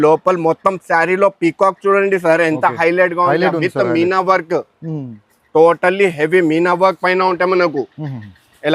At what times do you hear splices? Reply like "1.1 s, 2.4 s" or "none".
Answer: none

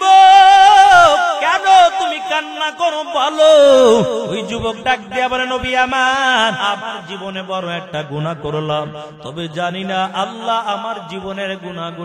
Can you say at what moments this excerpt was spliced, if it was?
1.4 s, 4.4 s, 6.6 s

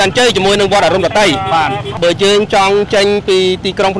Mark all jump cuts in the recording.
2.0 s

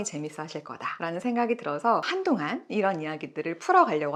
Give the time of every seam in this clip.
none

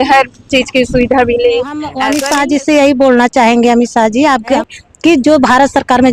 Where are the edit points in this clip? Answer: 2.0 s, 4.6 s

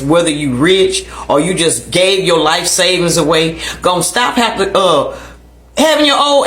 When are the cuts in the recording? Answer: none

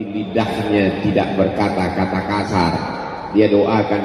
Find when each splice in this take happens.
none

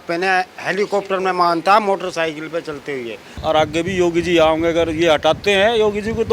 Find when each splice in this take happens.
3.4 s

